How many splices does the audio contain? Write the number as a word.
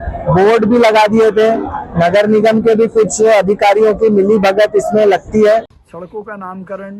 one